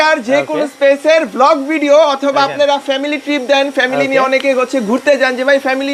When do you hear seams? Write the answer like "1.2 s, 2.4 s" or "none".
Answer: none